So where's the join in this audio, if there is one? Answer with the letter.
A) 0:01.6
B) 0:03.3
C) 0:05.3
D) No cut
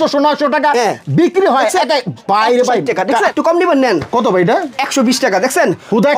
B